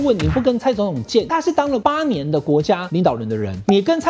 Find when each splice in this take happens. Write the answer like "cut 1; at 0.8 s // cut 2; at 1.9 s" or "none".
cut 1; at 1.4 s // cut 2; at 3.1 s